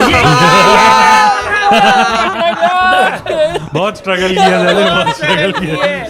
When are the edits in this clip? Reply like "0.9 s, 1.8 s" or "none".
none